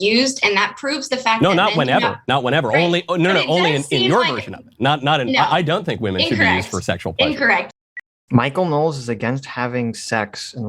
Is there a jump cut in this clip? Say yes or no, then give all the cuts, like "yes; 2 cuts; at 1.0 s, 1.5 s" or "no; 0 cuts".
yes; 1 cut; at 7.8 s